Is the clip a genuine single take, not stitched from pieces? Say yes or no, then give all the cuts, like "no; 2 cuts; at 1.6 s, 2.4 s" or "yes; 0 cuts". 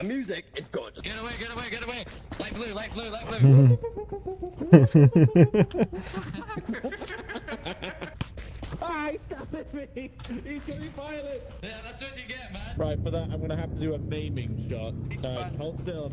no; 2 cuts; at 1.0 s, 8.1 s